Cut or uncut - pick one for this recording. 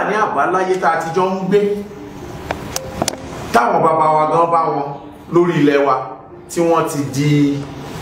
uncut